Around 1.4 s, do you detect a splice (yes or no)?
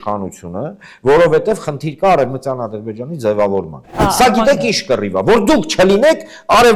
no